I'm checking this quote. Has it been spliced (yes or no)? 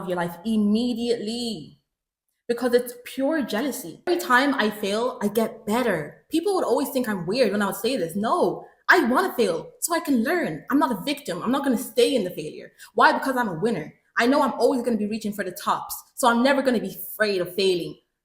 yes